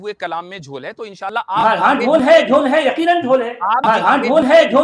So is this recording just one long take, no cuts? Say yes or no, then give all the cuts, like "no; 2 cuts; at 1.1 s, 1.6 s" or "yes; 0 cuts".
no; 2 cuts; at 1.4 s, 3.8 s